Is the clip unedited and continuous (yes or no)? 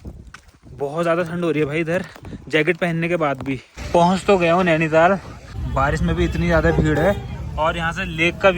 no